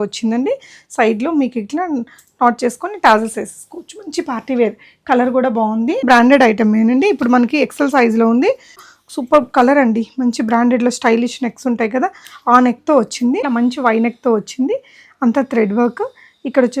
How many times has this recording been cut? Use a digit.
3